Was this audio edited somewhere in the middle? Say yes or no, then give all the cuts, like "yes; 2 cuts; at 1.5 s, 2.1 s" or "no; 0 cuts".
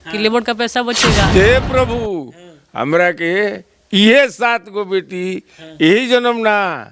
yes; 1 cut; at 1.3 s